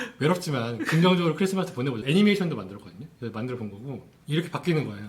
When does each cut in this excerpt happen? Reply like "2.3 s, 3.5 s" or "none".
2.0 s